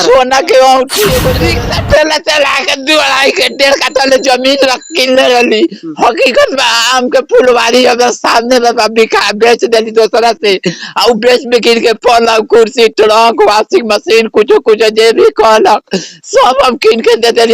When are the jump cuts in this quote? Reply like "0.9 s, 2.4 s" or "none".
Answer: 1.4 s

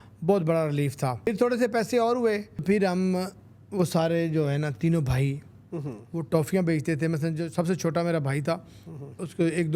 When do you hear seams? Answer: 1.3 s, 2.6 s

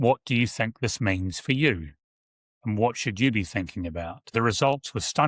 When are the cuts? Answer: 4.3 s

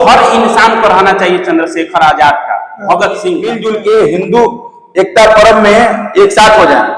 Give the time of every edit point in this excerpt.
3.5 s

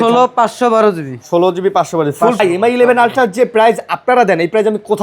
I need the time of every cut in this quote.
2.4 s

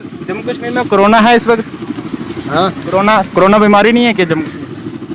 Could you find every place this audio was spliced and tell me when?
none

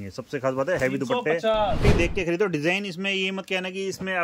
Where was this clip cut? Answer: 1.8 s

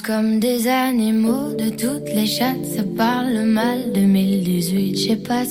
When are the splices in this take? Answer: none

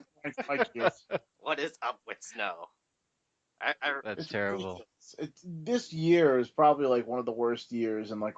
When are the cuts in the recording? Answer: 7.4 s

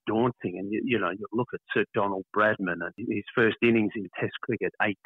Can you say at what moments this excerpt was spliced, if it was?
3.0 s

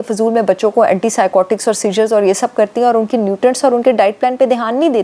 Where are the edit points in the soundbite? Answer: none

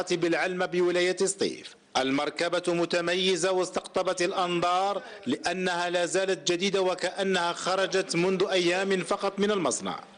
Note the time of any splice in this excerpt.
8.4 s

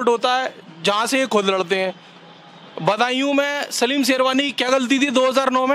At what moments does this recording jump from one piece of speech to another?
none

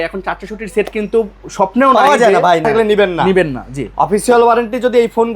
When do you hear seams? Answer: 2.6 s

